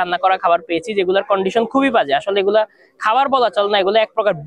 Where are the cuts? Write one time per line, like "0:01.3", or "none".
none